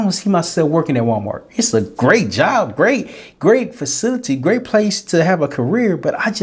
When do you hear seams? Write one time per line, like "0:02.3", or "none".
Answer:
none